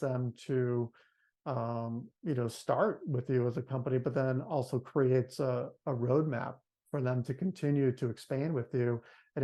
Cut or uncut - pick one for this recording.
uncut